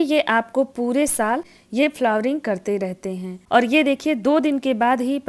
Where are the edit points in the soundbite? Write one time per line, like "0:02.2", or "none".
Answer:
0:01.5
0:03.3